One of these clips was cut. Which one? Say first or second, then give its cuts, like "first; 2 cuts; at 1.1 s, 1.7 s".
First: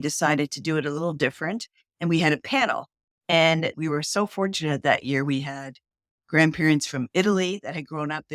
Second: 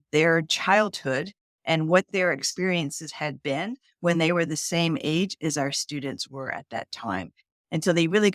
first; 1 cut; at 3.8 s